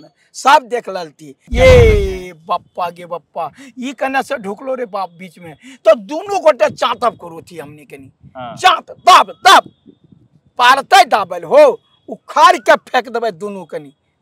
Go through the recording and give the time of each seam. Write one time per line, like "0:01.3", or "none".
0:01.5